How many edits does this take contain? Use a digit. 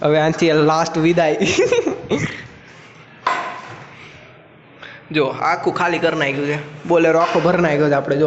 0